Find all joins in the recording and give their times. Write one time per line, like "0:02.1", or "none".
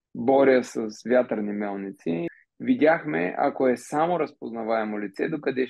0:02.3

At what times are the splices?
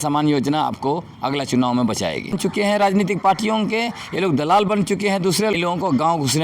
0:02.4
0:05.5

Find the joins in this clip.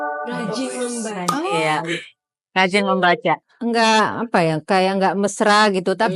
0:03.5

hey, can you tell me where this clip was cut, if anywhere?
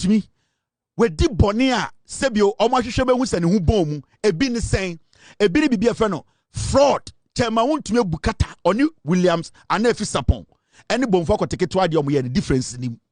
none

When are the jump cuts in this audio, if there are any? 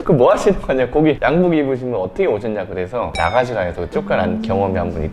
0:03.1

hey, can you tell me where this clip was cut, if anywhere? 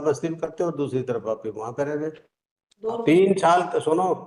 0:02.8

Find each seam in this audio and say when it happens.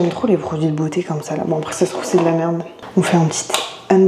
0:02.8

